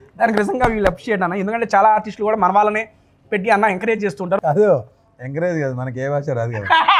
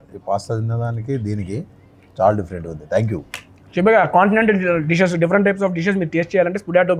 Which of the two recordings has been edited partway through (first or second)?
first